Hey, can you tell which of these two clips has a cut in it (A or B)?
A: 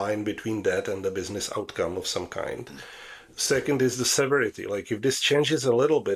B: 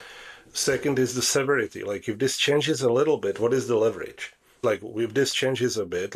B